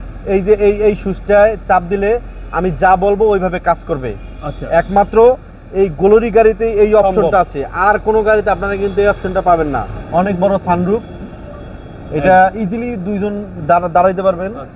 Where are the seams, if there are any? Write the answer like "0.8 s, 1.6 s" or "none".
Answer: 10.0 s